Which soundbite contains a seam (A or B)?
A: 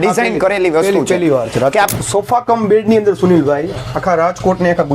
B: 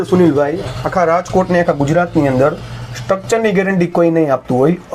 A